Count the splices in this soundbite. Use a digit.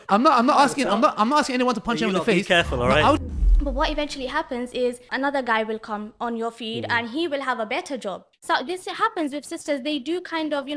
3